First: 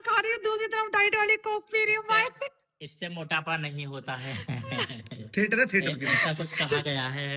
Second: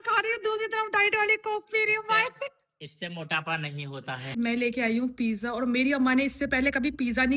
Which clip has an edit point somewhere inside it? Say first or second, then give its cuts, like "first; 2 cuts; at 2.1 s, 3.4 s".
second; 1 cut; at 4.3 s